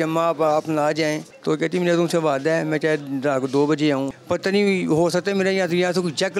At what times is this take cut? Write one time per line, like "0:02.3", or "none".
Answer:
0:01.3
0:04.1